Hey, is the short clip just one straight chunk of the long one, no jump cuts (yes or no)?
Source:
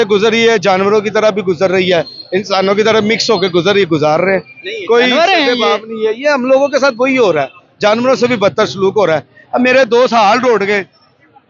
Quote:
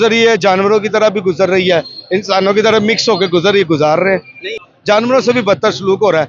no